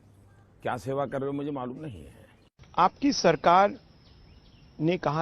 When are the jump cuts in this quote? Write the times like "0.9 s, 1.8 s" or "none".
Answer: 2.4 s